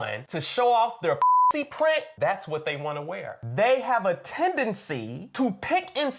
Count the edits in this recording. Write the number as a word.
one